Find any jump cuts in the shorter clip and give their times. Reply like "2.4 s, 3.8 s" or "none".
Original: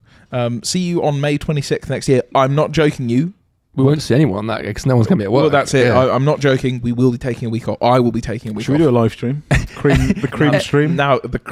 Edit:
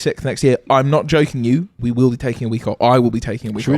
1.8 s